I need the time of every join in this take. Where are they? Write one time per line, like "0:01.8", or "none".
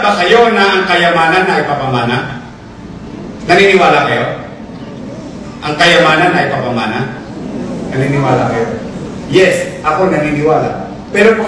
none